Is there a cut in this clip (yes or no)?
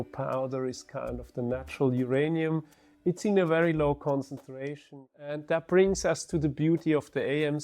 yes